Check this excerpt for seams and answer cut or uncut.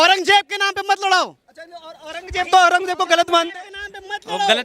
uncut